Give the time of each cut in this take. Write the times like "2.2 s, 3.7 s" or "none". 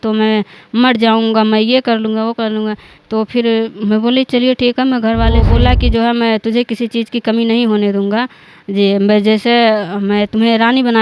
5.4 s